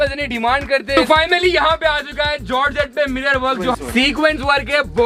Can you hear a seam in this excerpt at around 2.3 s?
no; 2 cuts; at 0.9 s, 3.5 s

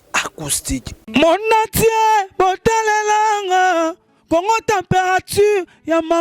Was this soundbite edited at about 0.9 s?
yes; 1 cut; at 0.9 s

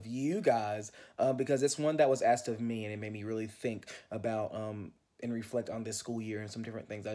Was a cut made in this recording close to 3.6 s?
no; 0 cuts

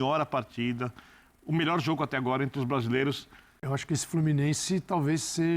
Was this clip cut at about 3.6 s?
yes; 1 cut; at 3.6 s

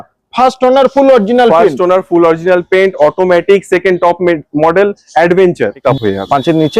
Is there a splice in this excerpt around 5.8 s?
yes; 1 cut; at 5.8 s

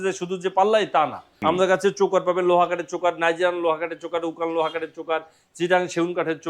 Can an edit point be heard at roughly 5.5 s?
no; 1 cut; at 1.2 s

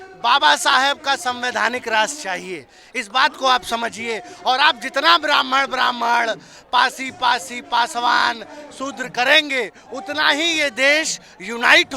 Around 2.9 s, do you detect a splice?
no; 0 cuts

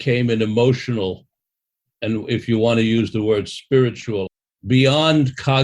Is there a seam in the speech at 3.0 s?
no; 1 cut; at 4.3 s

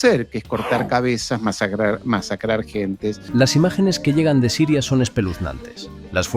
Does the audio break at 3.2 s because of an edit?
yes; 1 cut; at 3.2 s

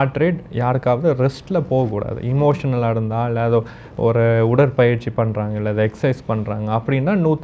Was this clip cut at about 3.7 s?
no; 0 cuts

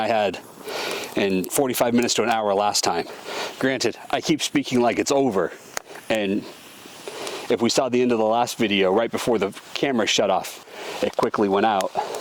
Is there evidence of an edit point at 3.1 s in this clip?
yes; 2 cuts; at 3.1 s, 10.6 s

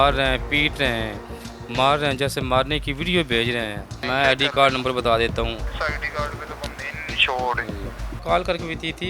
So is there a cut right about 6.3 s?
no; 1 cut; at 4.0 s

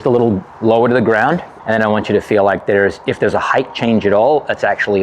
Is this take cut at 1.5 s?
yes; 1 cut; at 1.5 s

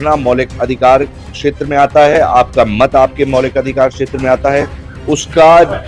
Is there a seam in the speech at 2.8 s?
no; 0 cuts

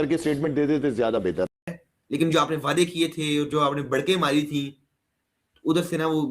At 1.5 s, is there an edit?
yes; 1 cut; at 1.5 s

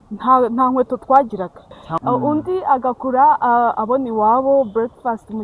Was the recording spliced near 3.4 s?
no; 1 cut; at 1.8 s

